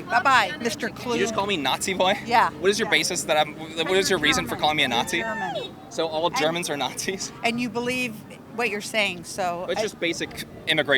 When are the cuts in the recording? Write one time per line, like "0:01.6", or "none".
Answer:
none